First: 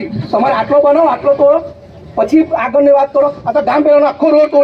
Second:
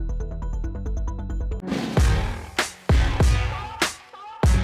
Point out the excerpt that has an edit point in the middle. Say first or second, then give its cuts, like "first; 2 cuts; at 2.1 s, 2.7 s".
second; 1 cut; at 1.6 s